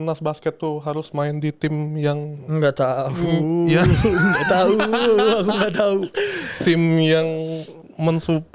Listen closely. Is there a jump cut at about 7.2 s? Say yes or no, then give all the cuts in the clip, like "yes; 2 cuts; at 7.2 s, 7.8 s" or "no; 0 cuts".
no; 0 cuts